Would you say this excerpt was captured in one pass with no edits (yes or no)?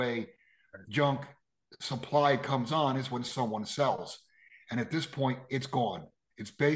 yes